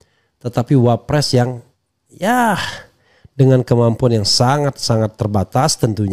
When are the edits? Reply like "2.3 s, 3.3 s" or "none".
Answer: none